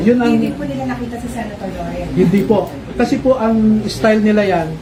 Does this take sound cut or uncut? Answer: uncut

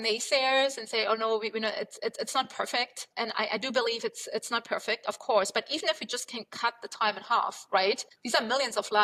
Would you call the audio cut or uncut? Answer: uncut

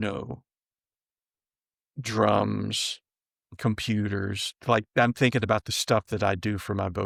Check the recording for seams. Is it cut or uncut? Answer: uncut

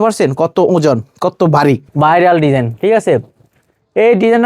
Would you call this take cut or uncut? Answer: cut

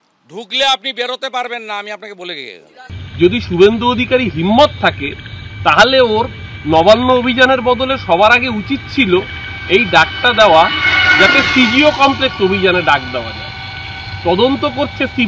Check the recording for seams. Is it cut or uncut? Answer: cut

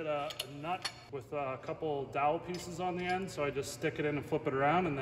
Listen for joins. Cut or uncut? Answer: cut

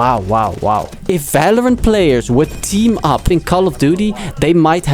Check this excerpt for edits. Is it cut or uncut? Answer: cut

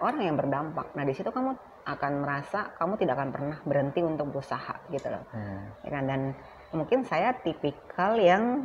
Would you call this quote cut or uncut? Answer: uncut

